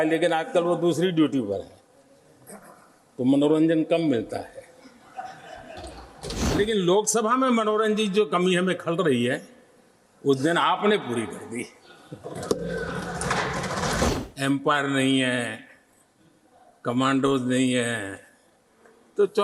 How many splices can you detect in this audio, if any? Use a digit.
2